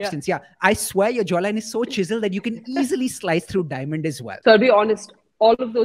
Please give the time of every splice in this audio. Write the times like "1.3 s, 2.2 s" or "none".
4.3 s